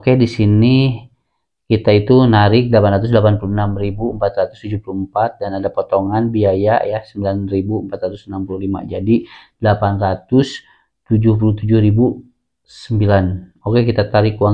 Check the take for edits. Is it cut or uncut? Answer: uncut